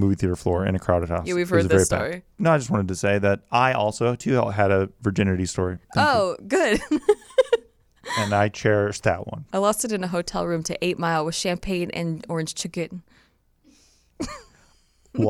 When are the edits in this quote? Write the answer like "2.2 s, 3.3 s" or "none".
none